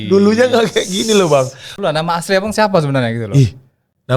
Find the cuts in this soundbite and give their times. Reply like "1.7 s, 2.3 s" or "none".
1.7 s